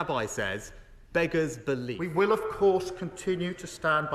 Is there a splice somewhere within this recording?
yes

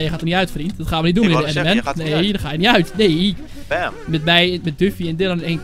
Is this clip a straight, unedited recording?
yes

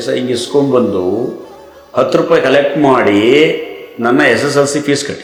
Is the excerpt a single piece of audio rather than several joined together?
yes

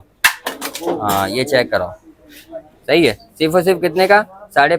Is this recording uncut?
yes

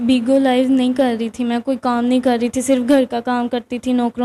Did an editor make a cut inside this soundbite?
no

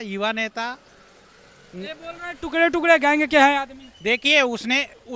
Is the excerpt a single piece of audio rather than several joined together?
yes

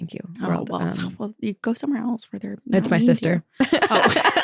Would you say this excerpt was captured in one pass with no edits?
yes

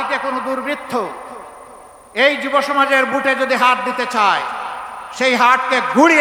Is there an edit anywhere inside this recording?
no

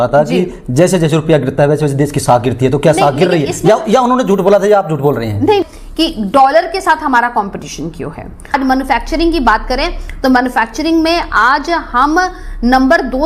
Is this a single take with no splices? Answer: no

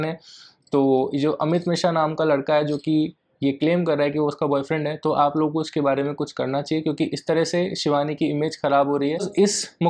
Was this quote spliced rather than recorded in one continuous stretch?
no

